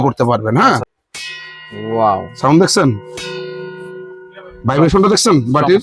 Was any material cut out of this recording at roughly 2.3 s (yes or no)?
no